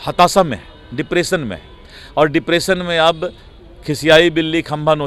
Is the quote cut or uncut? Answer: uncut